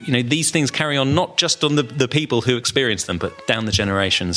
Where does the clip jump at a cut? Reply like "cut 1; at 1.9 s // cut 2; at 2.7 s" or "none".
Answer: cut 1; at 3.4 s